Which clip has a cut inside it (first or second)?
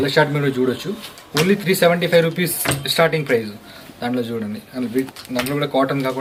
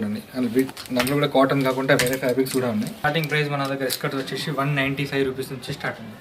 second